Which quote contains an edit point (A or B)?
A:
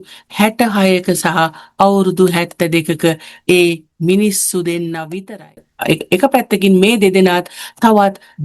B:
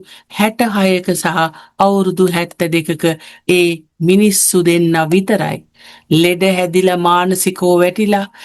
A